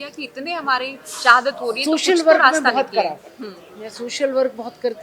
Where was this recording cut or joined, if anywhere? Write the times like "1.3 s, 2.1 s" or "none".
none